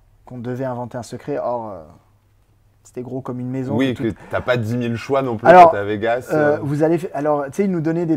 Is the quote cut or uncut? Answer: uncut